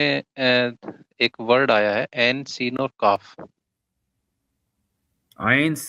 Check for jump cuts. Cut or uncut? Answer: uncut